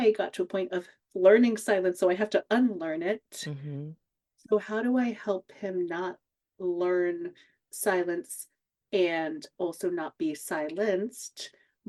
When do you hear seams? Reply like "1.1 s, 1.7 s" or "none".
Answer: none